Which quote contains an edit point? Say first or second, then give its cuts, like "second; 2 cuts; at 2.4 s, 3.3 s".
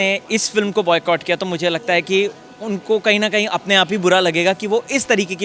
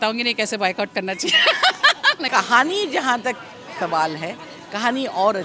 second; 1 cut; at 2.2 s